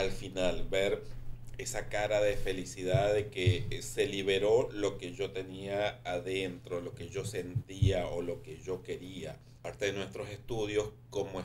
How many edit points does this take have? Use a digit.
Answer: 1